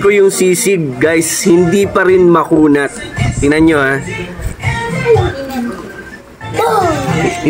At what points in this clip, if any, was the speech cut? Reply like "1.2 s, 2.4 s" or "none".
none